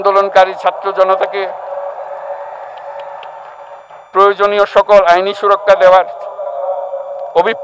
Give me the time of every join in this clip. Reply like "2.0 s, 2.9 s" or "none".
none